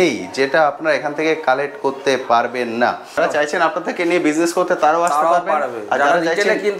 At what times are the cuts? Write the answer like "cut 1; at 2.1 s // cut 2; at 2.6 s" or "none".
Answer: cut 1; at 3.2 s